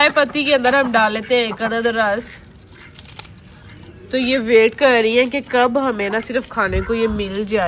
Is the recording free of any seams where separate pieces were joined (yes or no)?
yes